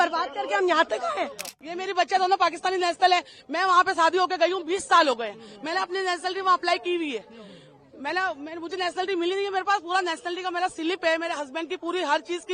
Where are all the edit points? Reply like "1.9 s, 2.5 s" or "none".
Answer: 1.6 s